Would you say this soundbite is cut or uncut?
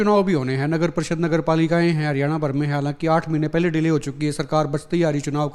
uncut